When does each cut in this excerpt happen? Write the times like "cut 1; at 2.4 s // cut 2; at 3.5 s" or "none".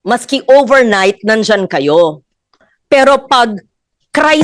none